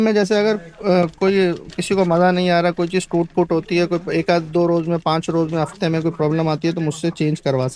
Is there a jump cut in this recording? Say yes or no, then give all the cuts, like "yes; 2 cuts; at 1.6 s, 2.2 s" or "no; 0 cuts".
no; 0 cuts